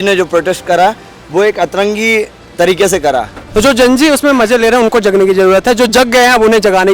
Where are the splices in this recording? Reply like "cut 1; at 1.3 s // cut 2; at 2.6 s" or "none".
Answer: cut 1; at 3.4 s